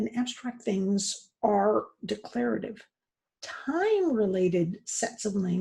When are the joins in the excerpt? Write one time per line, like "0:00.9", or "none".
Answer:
none